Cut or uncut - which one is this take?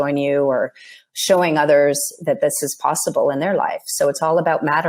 uncut